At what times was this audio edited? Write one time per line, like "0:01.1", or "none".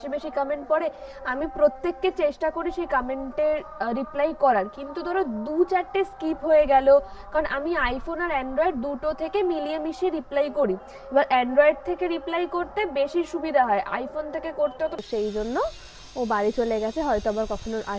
0:15.0